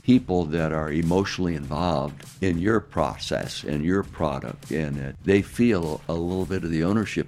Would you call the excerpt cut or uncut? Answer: cut